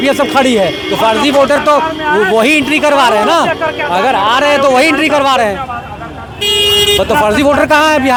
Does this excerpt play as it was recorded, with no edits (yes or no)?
yes